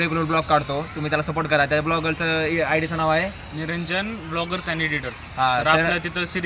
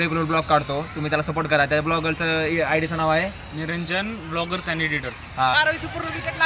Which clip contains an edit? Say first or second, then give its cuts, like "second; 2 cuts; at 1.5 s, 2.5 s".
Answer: second; 1 cut; at 5.5 s